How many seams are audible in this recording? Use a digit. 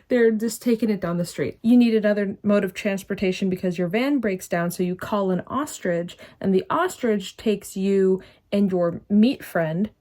1